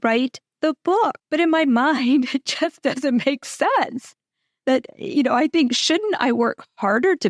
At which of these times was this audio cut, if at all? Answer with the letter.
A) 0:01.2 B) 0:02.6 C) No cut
A